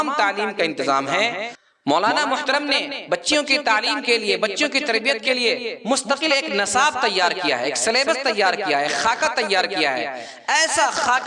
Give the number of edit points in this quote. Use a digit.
1